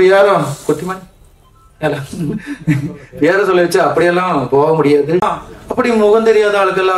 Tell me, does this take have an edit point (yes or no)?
yes